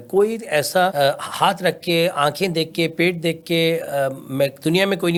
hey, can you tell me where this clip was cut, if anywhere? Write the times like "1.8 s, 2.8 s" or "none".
none